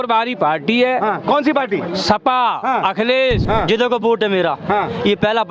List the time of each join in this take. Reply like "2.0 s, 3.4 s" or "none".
3.4 s